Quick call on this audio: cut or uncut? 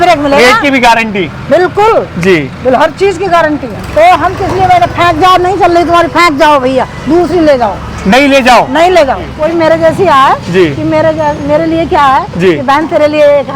cut